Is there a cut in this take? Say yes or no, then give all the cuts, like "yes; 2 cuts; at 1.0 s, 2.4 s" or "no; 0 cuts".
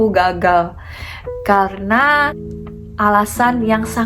yes; 1 cut; at 2.4 s